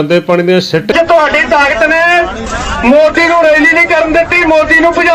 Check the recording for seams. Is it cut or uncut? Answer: cut